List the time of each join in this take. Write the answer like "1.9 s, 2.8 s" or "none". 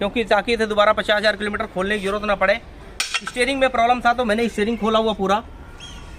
none